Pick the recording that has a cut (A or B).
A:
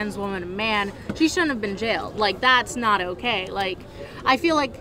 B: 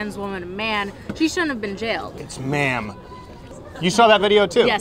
B